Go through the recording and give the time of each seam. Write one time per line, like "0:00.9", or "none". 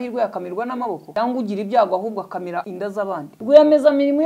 0:01.0
0:03.0